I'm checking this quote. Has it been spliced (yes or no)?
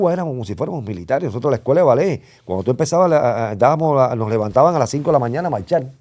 no